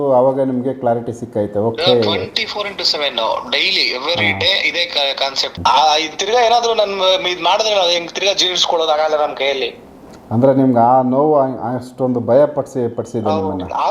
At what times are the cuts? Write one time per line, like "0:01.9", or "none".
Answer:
0:05.5

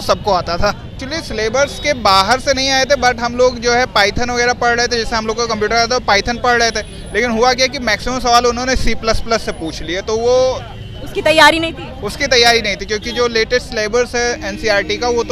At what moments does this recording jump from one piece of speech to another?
none

